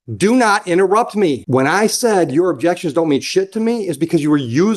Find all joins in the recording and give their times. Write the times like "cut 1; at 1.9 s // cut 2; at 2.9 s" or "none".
cut 1; at 1.4 s